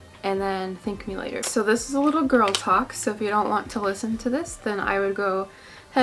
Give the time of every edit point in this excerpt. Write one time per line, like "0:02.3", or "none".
none